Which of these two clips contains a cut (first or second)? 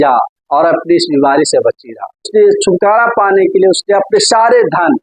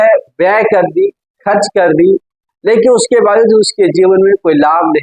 first